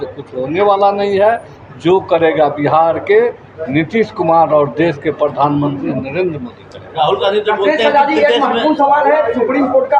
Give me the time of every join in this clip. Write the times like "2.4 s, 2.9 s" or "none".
none